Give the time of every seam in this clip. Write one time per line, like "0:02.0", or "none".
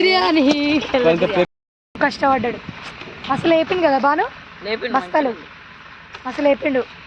0:01.5